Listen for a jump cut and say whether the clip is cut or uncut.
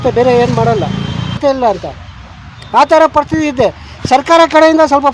cut